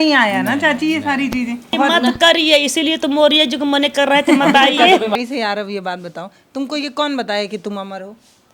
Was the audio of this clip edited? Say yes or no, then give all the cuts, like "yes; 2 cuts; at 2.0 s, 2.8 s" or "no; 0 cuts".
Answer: yes; 2 cuts; at 1.7 s, 5.1 s